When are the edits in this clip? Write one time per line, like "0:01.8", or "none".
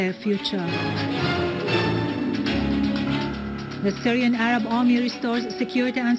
0:04.8